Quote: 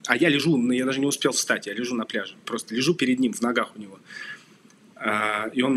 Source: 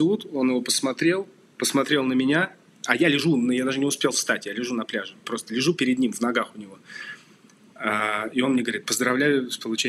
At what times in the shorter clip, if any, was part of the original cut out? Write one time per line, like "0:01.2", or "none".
none